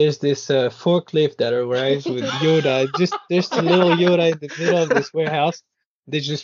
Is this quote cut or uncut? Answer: uncut